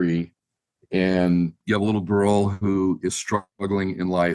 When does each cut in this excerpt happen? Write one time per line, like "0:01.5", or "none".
0:01.6